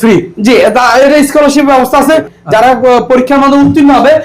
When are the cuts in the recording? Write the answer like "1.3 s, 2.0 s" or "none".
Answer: 2.3 s